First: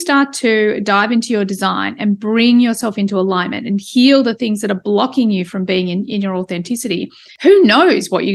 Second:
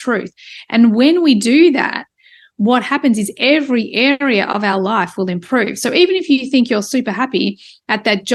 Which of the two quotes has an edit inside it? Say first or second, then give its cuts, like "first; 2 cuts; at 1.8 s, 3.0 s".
first; 1 cut; at 7.2 s